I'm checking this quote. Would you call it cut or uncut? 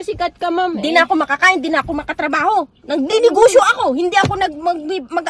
uncut